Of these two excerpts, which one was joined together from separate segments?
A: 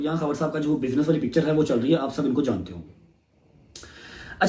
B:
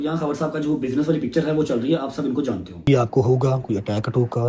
B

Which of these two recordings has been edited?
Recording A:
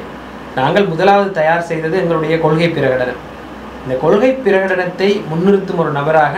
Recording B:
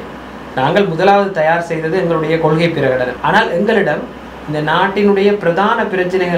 B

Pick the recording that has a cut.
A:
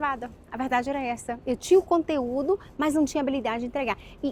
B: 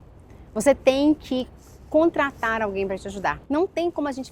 B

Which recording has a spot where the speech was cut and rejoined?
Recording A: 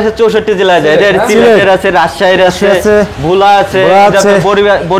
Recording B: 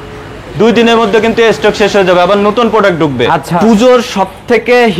B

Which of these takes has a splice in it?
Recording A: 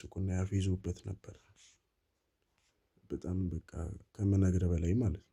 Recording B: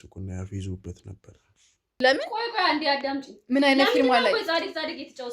B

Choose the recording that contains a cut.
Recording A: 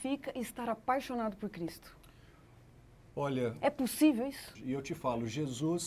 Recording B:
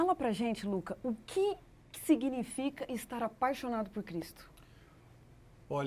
A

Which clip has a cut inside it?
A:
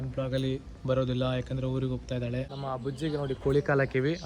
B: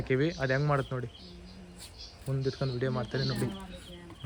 A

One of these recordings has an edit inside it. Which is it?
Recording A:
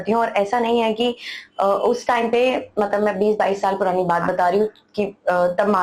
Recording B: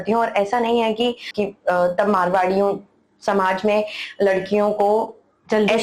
B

